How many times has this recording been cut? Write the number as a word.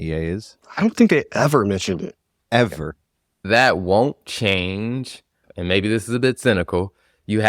two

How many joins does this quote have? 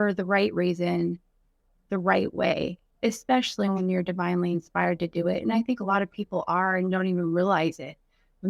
one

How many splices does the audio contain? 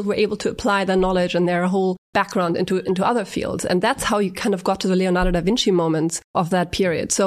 two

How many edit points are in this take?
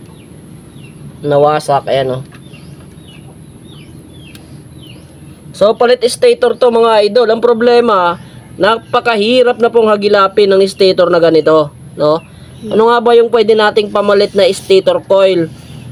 zero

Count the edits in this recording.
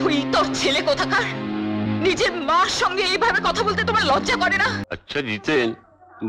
one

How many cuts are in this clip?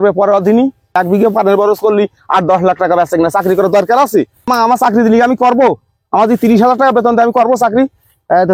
two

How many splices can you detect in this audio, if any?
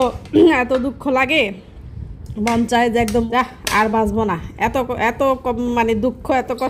one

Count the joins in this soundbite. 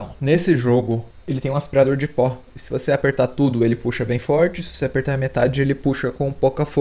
one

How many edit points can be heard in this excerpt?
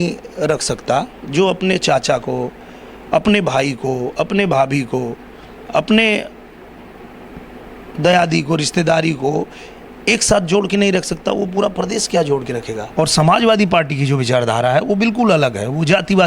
one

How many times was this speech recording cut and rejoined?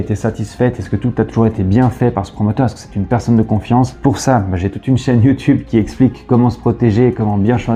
zero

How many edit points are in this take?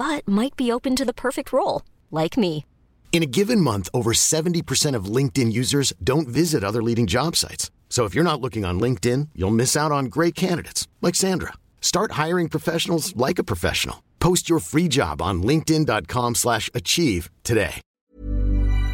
one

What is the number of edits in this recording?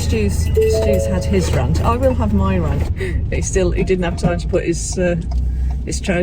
one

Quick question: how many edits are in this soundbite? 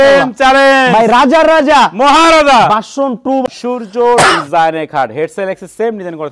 one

